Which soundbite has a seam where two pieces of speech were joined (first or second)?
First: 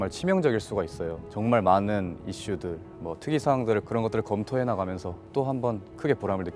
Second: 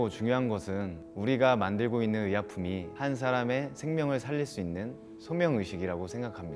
first